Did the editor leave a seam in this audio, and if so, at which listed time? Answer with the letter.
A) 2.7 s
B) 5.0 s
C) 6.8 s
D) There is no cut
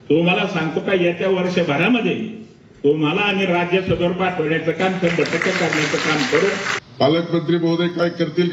C